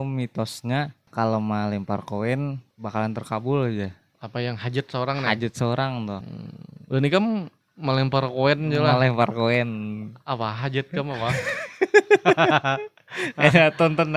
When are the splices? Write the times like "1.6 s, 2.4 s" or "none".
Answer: 1.1 s, 2.7 s, 6.2 s

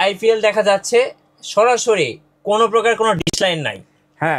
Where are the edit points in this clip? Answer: none

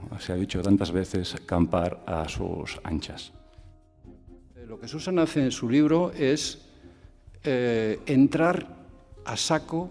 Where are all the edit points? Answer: 6.0 s

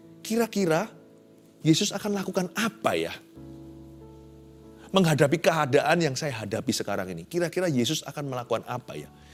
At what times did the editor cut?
none

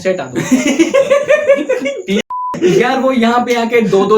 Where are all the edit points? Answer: 2.2 s

